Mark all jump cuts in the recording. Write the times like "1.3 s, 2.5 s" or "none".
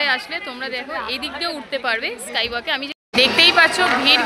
2.9 s

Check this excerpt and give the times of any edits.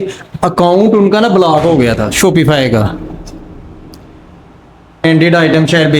5.0 s

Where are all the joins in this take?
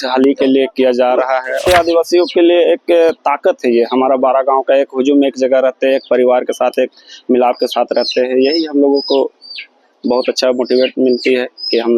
1.7 s

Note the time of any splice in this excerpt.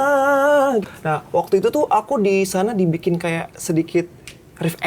0.9 s

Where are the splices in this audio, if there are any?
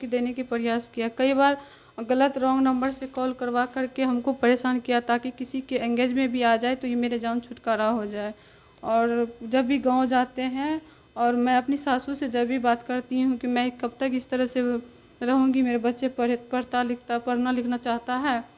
none

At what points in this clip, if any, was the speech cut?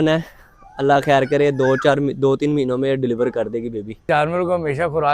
4.1 s

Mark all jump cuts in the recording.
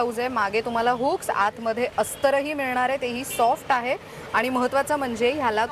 none

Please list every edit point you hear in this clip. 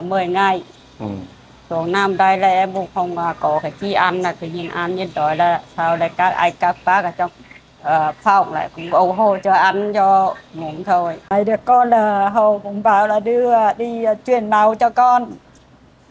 11.2 s

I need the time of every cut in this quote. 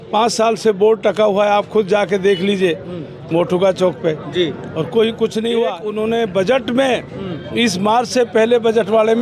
5.8 s

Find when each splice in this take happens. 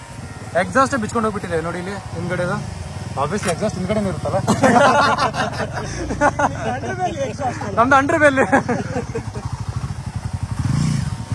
none

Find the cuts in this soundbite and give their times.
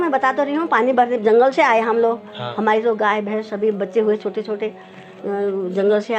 none

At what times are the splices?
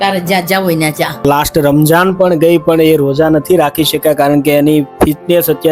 1.2 s

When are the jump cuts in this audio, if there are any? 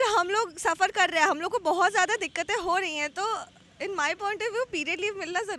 none

